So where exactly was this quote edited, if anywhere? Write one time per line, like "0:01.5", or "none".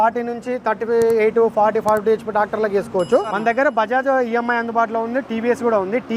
0:03.3